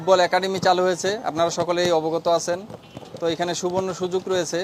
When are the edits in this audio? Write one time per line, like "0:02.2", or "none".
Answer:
none